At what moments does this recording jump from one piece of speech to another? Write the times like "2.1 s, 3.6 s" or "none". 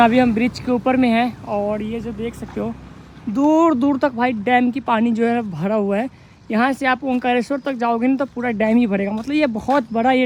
none